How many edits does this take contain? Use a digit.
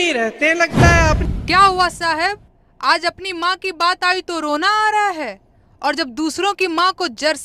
1